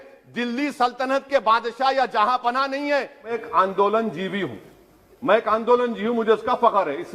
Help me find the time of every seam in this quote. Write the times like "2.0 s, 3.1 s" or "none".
3.4 s

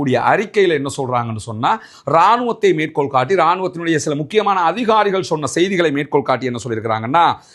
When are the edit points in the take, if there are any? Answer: 4.7 s

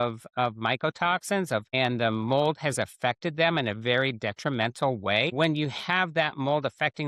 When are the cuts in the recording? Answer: 1.7 s, 5.3 s

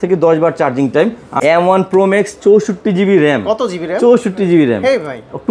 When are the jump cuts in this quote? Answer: 1.3 s

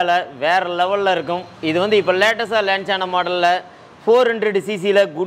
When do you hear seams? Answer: none

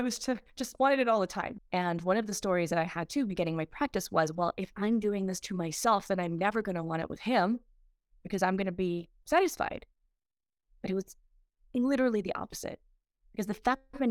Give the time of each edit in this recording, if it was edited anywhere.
1.4 s

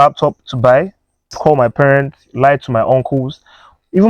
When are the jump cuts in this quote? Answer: 1.3 s

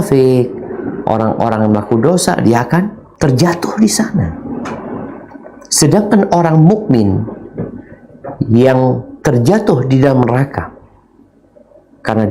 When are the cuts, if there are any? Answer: 3.0 s

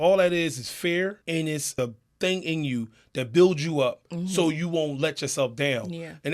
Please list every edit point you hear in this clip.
1.6 s

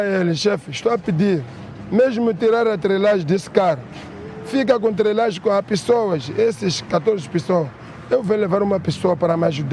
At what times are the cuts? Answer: none

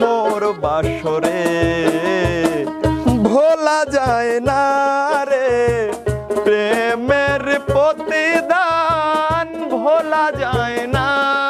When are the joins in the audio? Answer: none

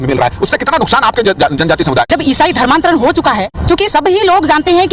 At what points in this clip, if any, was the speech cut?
2.1 s, 3.5 s

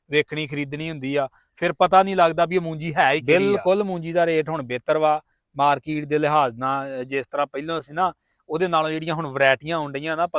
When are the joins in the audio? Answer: 3.2 s

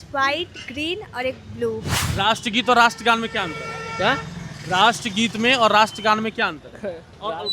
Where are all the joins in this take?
2.0 s

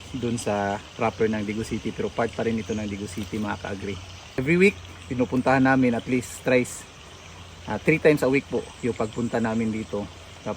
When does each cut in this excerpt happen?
4.3 s

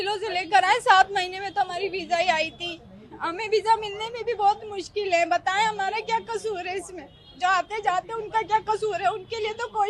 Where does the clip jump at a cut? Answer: none

